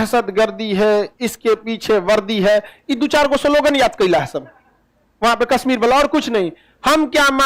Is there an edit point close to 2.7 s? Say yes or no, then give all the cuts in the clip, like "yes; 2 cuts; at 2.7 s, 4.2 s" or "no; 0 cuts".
no; 0 cuts